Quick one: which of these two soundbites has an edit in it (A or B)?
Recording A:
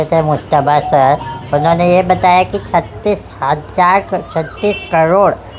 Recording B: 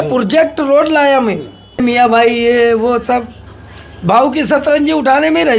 B